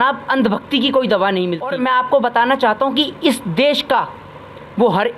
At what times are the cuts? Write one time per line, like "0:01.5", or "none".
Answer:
0:01.7